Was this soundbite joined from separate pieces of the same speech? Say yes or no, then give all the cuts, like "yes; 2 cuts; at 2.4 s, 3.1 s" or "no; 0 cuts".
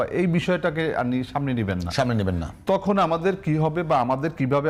no; 0 cuts